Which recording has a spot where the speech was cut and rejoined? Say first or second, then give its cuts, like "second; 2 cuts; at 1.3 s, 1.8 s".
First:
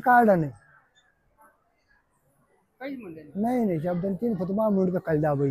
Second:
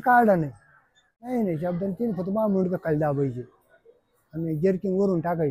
second; 1 cut; at 1.3 s